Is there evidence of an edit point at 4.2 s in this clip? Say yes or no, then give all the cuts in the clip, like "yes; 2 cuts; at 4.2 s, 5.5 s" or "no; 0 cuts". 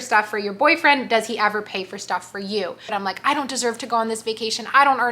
no; 1 cut; at 2.9 s